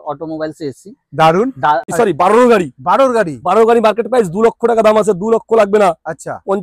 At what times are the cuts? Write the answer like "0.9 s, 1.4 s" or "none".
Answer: 1.9 s